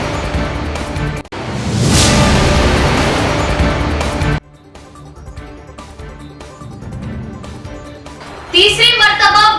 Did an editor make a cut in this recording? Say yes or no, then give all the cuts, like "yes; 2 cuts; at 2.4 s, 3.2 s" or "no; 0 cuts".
yes; 2 cuts; at 1.2 s, 6.1 s